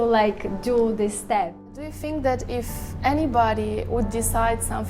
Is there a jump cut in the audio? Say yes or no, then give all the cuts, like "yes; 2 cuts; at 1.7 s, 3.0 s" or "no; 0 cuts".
yes; 1 cut; at 1.8 s